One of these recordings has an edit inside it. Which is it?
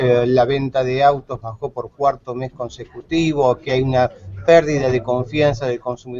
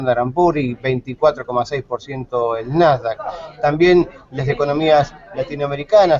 second; 1 cut; at 4.3 s

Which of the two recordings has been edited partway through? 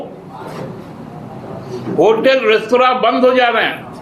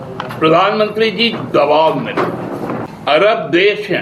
second; 1 cut; at 2.9 s

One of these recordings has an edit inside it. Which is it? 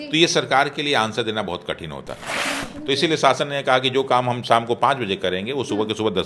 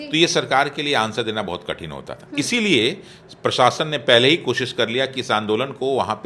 first; 1 cut; at 2.2 s

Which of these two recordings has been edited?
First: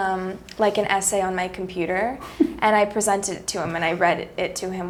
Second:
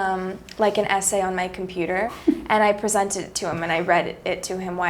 second; 1 cut; at 2.2 s

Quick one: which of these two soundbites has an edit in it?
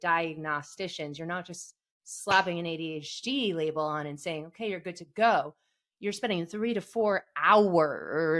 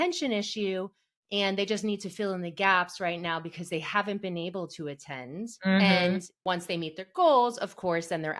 second; 2 cuts; at 5.5 s, 6.3 s

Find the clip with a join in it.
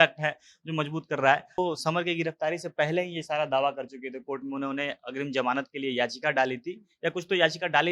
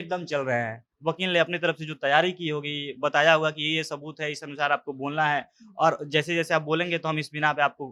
first; 1 cut; at 1.6 s

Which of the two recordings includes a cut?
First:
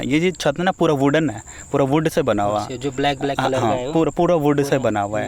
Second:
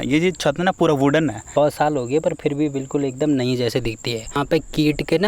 second; 2 cuts; at 1.4 s, 4.4 s

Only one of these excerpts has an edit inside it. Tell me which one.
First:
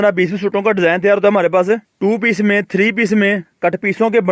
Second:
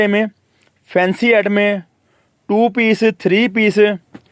first; 2 cuts; at 1.9 s, 3.5 s

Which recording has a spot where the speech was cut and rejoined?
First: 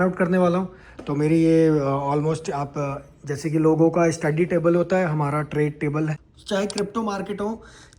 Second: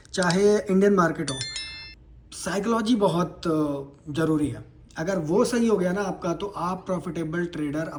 first; 1 cut; at 6.3 s

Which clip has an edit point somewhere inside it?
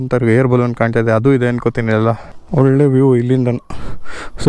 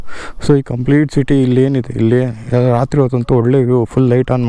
first; 1 cut; at 2.3 s

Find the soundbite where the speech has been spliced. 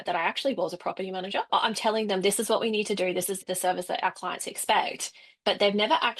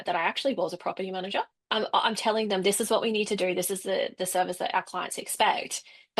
first; 2 cuts; at 1.5 s, 3.4 s

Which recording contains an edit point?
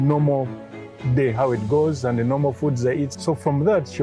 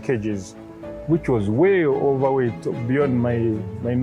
first; 1 cut; at 3.1 s

